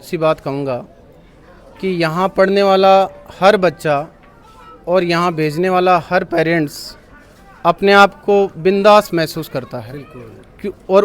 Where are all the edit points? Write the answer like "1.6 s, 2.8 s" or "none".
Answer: none